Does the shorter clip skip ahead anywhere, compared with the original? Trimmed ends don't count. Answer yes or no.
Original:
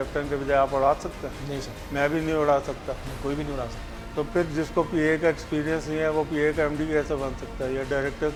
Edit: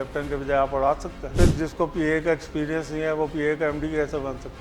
yes